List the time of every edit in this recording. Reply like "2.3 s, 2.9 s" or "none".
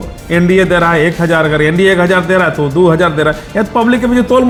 none